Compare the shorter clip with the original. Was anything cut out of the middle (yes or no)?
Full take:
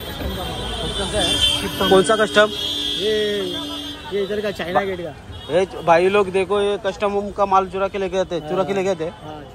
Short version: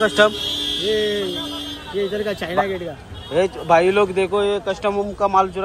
no